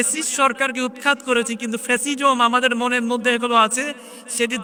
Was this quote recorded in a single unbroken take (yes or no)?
yes